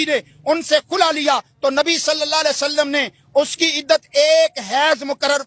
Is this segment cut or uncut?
uncut